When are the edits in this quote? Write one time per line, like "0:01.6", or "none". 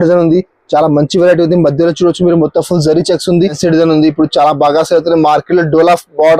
0:03.6